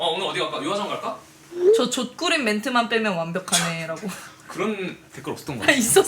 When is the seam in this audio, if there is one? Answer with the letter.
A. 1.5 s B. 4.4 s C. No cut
A